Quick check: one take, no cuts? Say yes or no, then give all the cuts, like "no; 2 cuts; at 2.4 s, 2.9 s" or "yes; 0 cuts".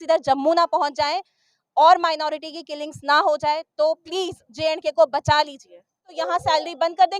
no; 1 cut; at 6.1 s